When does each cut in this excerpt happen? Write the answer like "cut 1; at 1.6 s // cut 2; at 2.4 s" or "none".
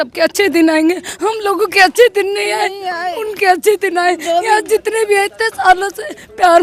none